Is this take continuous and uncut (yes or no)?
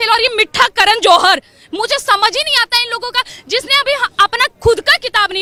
yes